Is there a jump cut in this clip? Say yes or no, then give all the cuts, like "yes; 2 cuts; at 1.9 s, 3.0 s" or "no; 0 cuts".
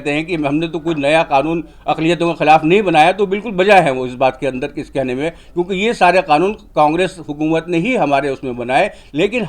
no; 0 cuts